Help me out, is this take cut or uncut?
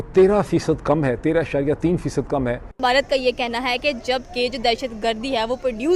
cut